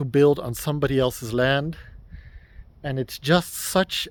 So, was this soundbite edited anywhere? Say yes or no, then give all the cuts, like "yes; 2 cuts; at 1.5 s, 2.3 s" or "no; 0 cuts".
no; 0 cuts